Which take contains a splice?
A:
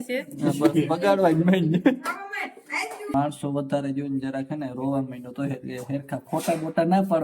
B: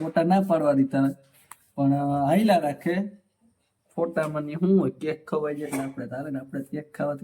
A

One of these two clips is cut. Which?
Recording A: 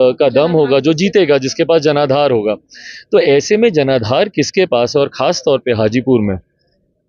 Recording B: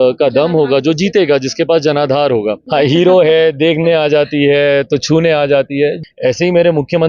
B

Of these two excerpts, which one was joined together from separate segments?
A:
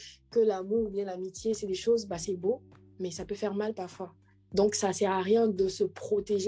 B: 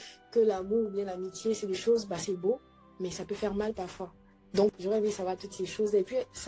B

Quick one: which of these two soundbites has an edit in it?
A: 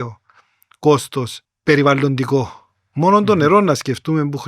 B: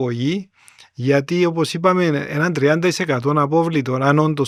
A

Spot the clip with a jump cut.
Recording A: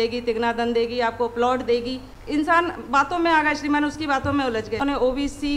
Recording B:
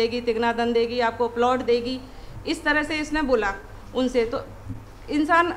A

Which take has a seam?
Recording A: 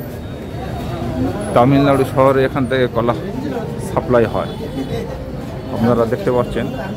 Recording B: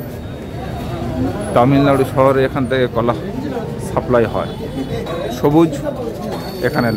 B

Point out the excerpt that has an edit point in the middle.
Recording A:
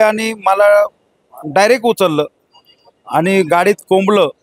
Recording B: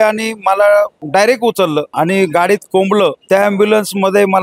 B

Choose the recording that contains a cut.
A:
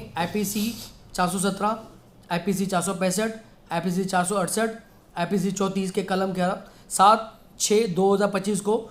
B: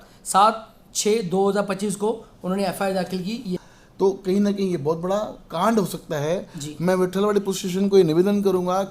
B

